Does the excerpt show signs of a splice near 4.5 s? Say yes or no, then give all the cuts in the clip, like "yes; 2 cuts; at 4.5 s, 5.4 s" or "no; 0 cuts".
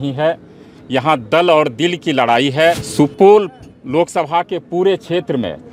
no; 1 cut; at 2.9 s